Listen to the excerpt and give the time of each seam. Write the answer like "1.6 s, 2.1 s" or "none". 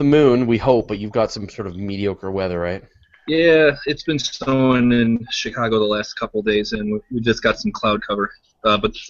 6.3 s

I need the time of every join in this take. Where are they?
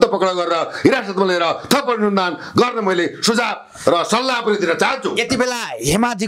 none

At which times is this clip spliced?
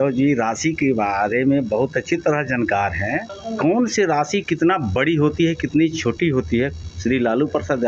3.4 s, 6.8 s

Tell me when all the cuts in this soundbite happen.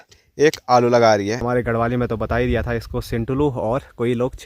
1.4 s

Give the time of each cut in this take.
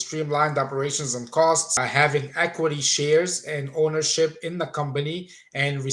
1.7 s

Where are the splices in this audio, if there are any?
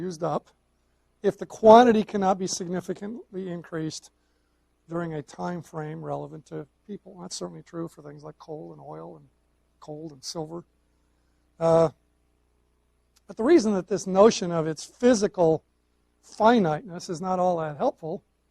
1.4 s

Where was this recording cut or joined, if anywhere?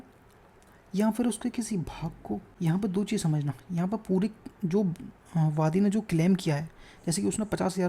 2.5 s

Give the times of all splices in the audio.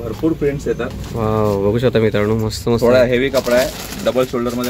none

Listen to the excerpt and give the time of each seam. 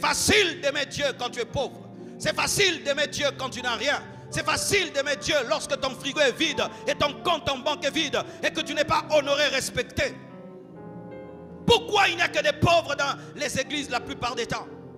none

